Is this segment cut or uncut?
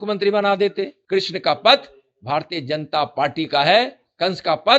cut